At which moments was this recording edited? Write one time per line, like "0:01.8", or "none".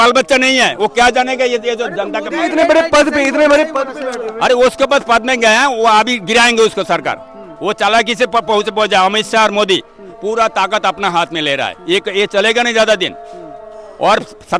0:10.0